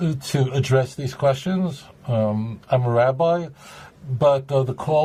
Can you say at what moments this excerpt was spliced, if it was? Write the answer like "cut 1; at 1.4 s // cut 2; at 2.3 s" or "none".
none